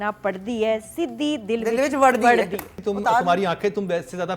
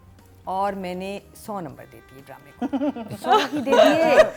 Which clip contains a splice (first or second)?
first